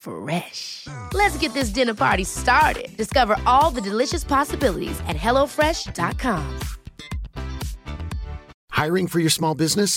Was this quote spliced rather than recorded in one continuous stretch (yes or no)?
no